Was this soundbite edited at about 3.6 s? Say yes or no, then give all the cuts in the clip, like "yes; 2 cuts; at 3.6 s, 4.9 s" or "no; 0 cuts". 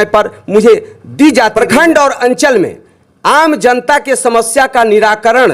no; 1 cut; at 1.5 s